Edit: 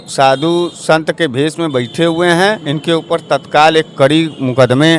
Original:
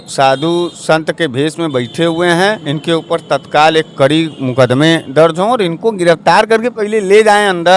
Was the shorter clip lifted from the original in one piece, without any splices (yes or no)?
yes